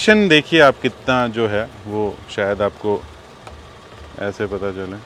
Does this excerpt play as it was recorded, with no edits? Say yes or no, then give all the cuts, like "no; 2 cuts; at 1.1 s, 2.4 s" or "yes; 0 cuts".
yes; 0 cuts